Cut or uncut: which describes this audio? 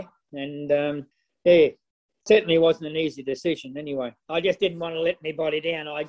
cut